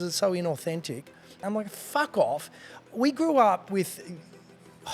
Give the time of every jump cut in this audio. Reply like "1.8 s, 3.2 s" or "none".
1.4 s